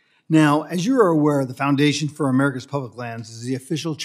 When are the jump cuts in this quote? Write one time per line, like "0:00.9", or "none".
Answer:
0:02.1